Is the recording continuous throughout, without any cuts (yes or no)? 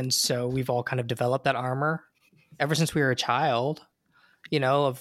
yes